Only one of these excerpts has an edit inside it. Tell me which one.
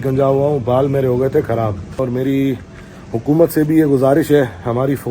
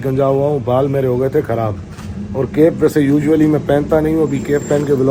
first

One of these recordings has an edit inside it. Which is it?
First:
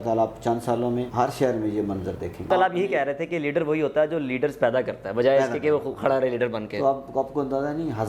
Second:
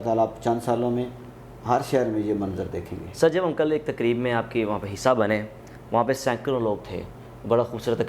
first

